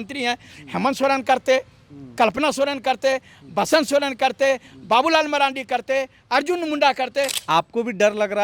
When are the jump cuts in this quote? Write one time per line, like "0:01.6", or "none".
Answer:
0:07.4